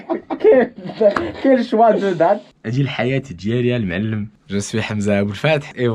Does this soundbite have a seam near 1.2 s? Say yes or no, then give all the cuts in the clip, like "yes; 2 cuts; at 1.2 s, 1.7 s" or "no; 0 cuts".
no; 2 cuts; at 2.4 s, 4.4 s